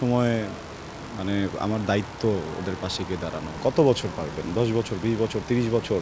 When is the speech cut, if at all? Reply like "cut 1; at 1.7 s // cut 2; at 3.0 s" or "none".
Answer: cut 1; at 3.6 s